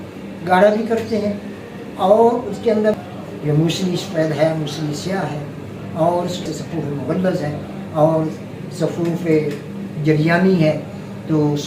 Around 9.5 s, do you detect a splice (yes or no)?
no